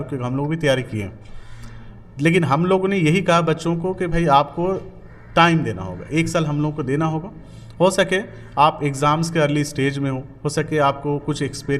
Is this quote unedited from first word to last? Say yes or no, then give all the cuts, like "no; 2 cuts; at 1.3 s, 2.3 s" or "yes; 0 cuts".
yes; 0 cuts